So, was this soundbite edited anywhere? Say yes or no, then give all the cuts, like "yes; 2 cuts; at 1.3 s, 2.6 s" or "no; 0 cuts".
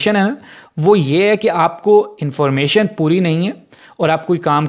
no; 0 cuts